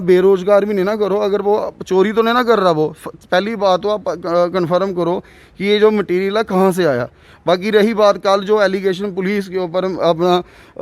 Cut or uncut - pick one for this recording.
uncut